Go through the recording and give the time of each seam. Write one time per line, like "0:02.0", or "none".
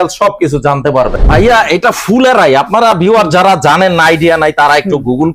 0:01.1